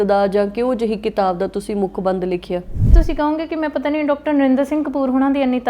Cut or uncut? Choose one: cut